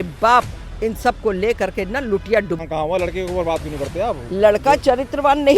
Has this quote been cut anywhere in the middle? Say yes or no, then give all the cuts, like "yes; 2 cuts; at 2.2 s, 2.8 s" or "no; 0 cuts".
yes; 1 cut; at 2.6 s